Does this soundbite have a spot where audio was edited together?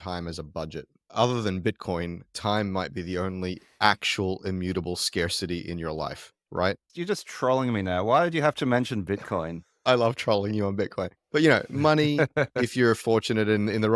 no; 0 cuts

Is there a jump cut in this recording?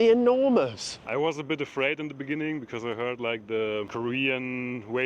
yes; 2 cuts; at 0.9 s, 3.9 s

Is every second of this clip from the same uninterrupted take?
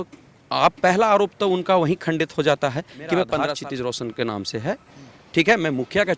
no; 1 cut; at 3.4 s

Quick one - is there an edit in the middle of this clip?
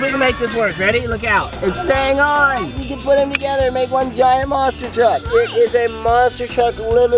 yes; 3 cuts; at 1.5 s, 2.9 s, 5.2 s

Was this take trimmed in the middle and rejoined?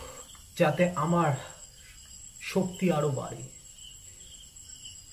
no; 0 cuts

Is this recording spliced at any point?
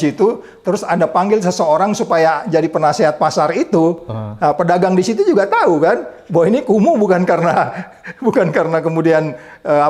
no; 0 cuts

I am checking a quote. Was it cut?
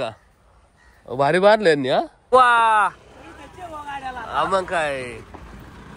yes; 1 cut; at 2.2 s

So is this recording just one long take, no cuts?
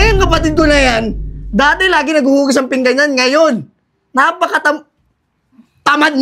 yes; 0 cuts

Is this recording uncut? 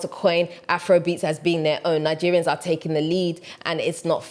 yes; 0 cuts

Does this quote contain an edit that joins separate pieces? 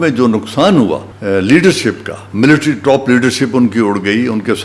yes; 1 cut; at 1.1 s

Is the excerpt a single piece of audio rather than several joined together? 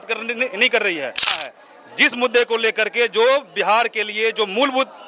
no; 1 cut; at 1.4 s

